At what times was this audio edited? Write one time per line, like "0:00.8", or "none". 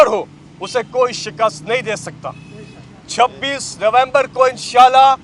none